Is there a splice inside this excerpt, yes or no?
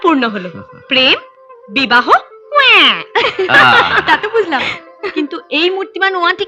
no